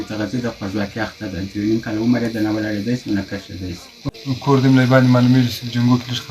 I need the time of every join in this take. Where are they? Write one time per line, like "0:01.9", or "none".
0:04.0

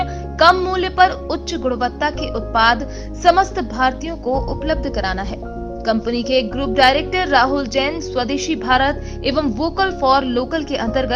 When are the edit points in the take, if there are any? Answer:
none

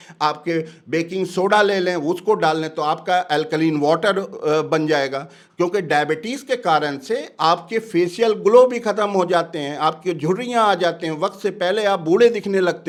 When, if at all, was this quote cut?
none

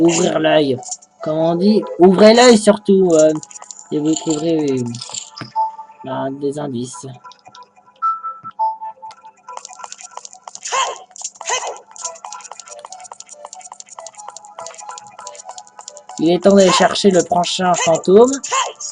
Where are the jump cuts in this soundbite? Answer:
0:08.4

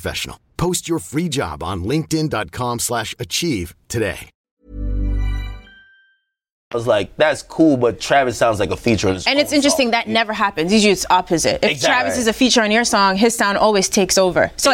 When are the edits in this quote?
none

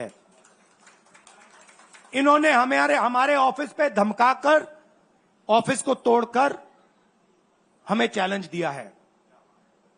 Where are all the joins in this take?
none

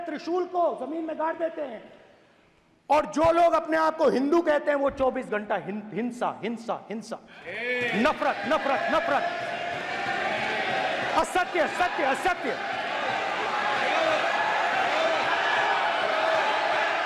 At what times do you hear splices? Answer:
none

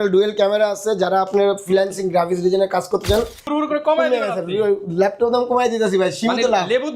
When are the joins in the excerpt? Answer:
0:03.4

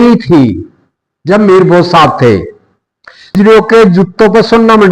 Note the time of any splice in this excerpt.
0:03.4

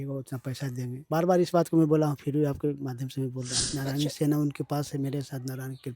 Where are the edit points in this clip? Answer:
0:03.6

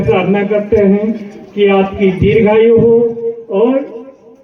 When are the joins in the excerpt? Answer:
none

